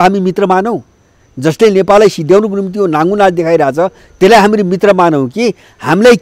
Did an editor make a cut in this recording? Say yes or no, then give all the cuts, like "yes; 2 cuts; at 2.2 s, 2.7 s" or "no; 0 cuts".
no; 0 cuts